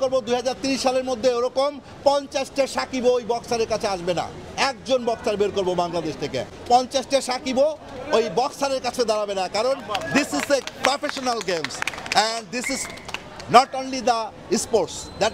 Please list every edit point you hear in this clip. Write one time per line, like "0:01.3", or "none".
none